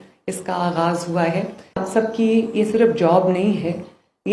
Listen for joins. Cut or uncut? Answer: cut